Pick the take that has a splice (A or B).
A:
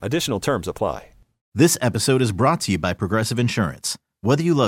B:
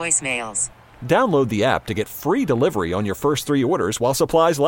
A